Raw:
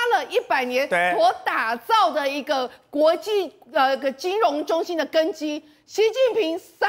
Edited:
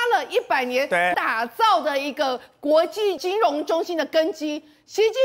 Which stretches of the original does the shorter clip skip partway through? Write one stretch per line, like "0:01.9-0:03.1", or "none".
0:01.1-0:01.4
0:03.5-0:04.2